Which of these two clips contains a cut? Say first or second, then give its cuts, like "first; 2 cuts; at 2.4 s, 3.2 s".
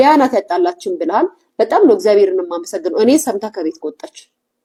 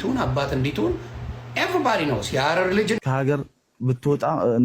second; 1 cut; at 3.0 s